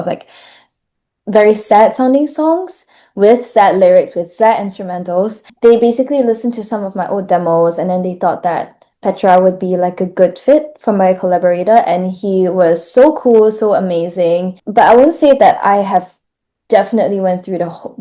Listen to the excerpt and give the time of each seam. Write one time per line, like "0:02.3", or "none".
0:05.4
0:14.6